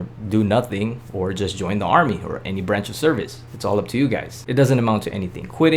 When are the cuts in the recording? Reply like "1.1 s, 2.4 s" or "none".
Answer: 4.3 s